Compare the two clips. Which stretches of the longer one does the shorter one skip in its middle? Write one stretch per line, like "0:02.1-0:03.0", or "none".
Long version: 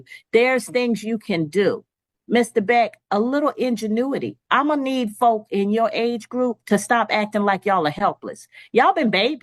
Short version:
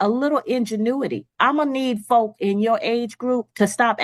none